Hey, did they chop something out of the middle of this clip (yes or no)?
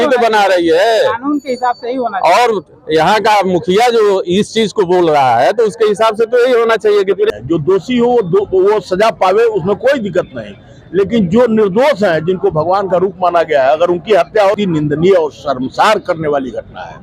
yes